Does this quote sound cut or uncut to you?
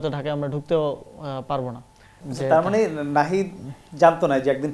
cut